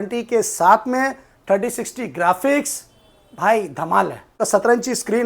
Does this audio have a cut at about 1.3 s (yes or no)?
no